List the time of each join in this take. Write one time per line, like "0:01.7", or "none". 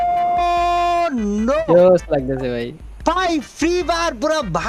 none